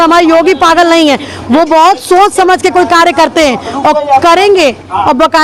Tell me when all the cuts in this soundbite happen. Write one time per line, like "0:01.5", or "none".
none